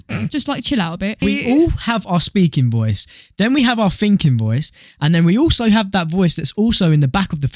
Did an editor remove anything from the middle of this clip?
yes; 1 cut; at 1.2 s

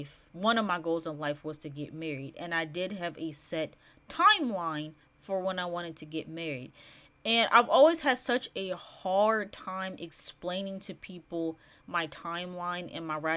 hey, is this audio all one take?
yes; 0 cuts

